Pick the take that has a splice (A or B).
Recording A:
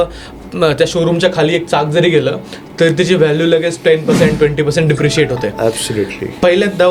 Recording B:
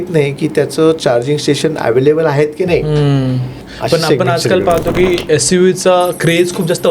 B